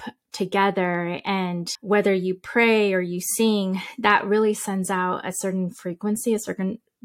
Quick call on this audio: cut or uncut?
cut